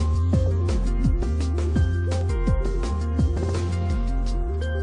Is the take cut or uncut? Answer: uncut